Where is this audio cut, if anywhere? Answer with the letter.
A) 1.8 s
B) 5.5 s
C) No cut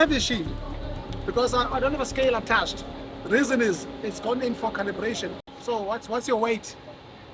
B